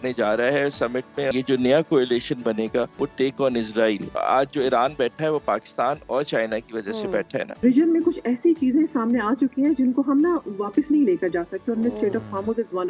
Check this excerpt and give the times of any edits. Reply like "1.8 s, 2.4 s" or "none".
1.3 s, 2.9 s, 4.1 s, 7.6 s